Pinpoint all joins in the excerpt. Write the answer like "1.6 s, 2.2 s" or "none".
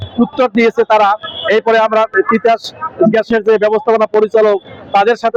none